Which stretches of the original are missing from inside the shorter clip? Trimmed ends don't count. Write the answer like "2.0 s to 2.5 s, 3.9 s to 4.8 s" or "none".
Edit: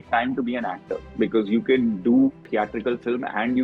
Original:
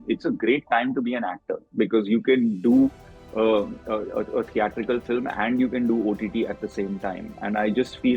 3.0 s to 4.5 s